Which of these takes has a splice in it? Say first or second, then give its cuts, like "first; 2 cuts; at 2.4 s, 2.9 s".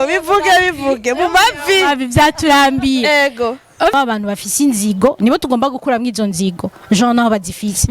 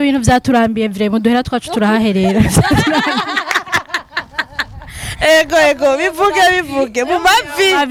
first; 1 cut; at 3.9 s